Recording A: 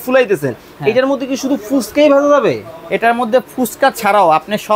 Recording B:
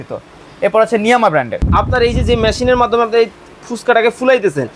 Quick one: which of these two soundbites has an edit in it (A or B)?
B